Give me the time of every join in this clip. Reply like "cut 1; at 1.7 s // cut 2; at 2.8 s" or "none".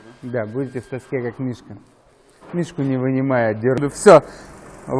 cut 1; at 3.8 s